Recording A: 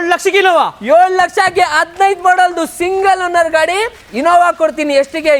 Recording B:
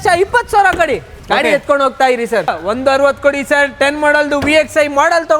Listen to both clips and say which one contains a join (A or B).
B